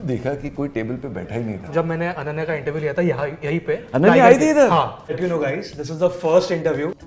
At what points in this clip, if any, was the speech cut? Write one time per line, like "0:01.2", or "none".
0:01.6
0:05.1